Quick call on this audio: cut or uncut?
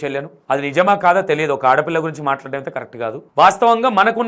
uncut